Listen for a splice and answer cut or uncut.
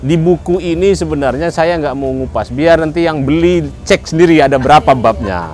uncut